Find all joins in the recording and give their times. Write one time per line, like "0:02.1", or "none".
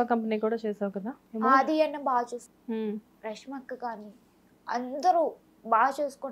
0:01.2
0:02.5